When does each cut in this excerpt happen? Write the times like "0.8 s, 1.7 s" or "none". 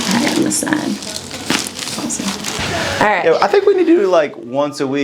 2.6 s